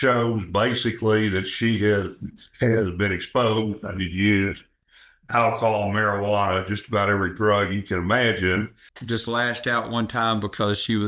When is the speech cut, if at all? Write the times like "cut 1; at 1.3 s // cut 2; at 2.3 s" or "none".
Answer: cut 1; at 8.8 s